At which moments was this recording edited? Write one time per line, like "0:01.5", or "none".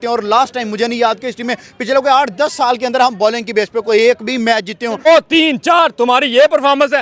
0:05.1